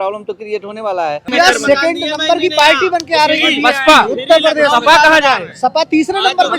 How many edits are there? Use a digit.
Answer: 1